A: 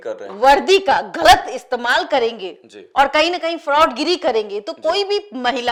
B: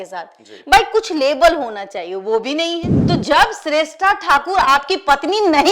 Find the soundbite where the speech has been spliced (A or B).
B